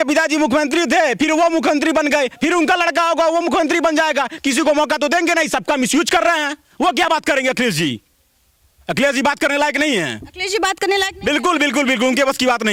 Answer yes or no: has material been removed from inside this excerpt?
no